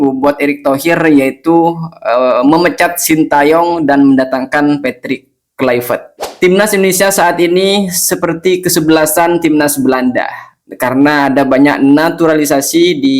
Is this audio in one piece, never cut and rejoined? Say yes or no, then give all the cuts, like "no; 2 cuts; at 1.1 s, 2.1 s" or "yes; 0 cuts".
no; 1 cut; at 6.5 s